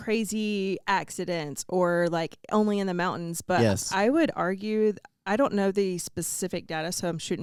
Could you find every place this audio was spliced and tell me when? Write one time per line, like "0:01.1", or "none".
none